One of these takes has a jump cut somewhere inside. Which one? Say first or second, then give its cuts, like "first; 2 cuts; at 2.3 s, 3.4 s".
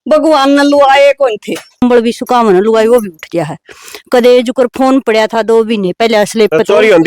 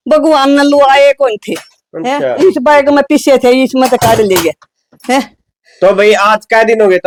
first; 1 cut; at 1.8 s